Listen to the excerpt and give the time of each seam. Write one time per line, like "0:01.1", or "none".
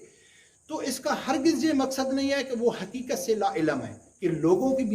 0:04.0